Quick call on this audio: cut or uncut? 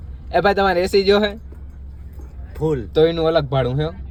uncut